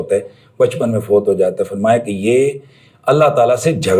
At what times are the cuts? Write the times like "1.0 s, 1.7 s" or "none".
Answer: none